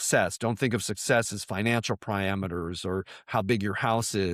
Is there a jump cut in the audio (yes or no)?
no